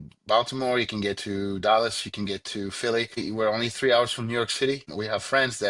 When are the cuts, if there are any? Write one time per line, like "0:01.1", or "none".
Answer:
0:03.2
0:04.9